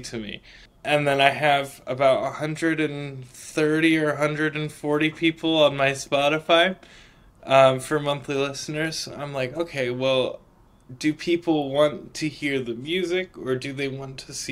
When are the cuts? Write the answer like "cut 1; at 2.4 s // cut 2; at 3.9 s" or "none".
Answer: none